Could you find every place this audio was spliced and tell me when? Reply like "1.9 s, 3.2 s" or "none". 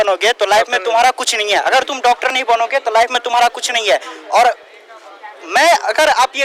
none